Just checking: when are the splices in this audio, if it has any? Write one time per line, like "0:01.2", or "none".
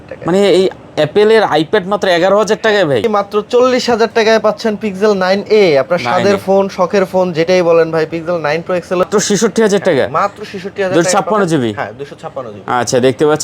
0:03.0
0:09.0